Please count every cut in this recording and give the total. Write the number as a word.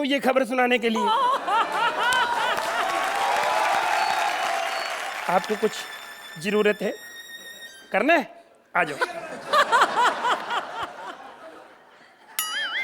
zero